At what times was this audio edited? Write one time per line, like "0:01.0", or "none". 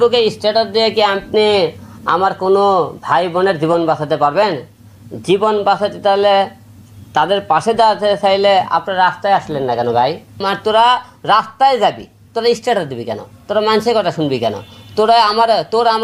0:10.4